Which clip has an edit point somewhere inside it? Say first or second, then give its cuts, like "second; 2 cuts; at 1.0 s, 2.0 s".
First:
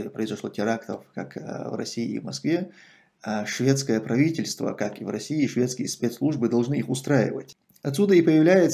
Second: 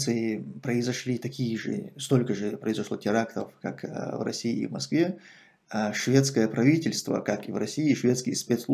first; 1 cut; at 7.5 s